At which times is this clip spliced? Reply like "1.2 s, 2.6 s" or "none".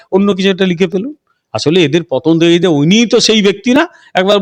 none